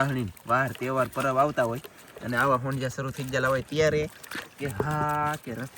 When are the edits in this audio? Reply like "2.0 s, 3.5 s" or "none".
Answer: none